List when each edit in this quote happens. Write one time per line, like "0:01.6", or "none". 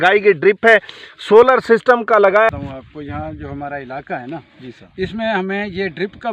0:02.5